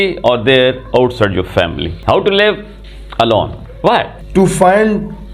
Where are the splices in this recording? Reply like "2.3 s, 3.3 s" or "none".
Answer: 1.9 s, 4.2 s